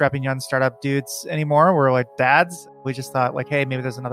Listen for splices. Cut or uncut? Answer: cut